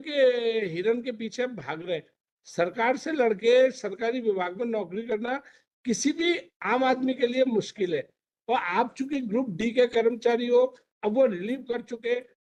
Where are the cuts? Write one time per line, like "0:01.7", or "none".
none